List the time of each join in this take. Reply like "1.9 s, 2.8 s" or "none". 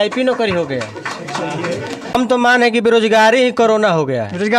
2.2 s